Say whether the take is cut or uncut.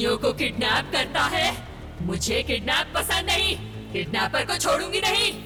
uncut